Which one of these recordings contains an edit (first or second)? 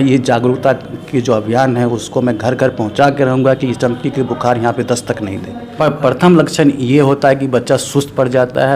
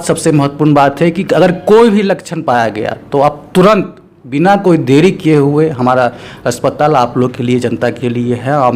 first